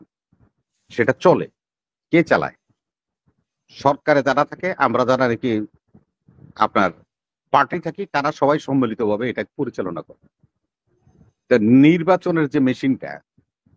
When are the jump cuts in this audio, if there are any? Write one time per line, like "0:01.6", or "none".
none